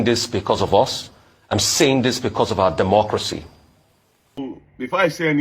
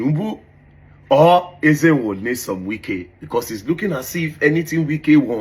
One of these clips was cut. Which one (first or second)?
first